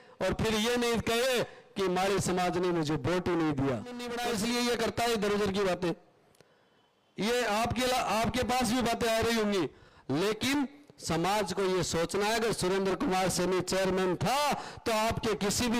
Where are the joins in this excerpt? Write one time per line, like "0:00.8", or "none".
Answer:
0:04.1